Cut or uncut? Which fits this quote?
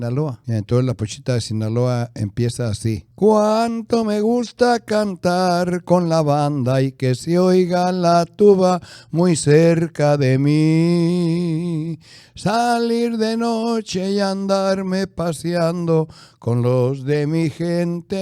uncut